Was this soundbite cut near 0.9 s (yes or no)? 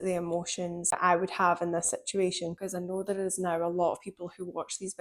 yes